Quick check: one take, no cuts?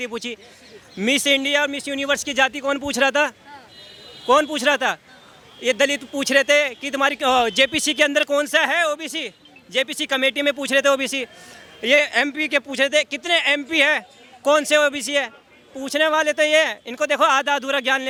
yes; 0 cuts

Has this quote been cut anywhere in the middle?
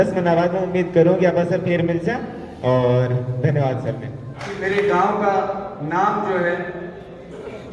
yes; 1 cut; at 4.6 s

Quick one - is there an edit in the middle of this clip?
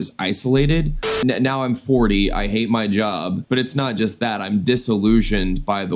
yes; 2 cuts; at 1.1 s, 3.4 s

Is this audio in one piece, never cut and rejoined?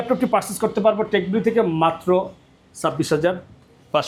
yes; 0 cuts

